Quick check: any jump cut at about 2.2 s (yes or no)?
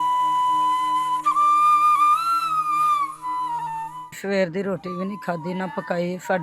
no